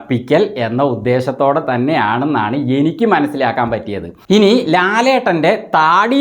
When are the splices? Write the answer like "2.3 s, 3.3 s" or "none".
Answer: 4.2 s